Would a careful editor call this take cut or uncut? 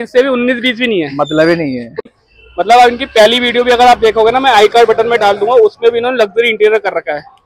cut